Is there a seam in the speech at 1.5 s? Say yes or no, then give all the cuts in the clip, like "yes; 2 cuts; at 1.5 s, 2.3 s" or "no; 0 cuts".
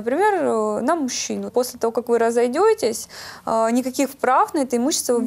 yes; 1 cut; at 1.5 s